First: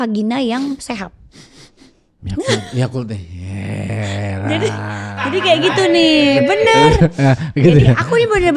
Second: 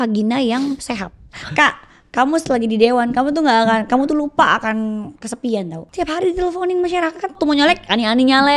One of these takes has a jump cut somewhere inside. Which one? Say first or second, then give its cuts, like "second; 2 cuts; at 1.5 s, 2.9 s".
second; 3 cuts; at 1.4 s, 5.8 s, 7.3 s